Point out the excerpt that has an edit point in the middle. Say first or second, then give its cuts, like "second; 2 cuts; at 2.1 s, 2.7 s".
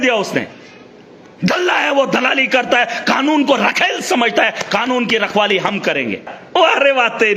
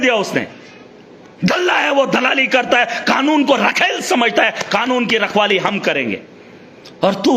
first; 1 cut; at 6.4 s